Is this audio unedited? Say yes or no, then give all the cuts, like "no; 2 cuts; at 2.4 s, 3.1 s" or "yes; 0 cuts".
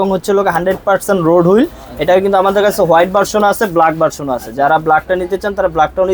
yes; 0 cuts